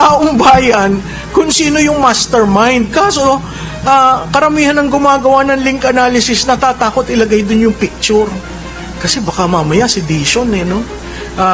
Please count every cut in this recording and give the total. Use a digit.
0